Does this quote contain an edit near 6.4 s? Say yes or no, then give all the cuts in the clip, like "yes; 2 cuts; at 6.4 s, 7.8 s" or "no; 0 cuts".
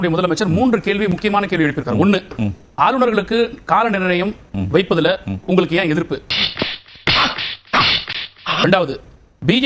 yes; 2 cuts; at 6.4 s, 8.6 s